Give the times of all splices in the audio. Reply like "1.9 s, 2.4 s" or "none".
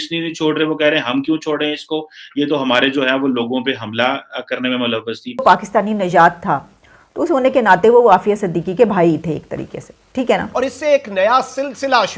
5.4 s, 10.5 s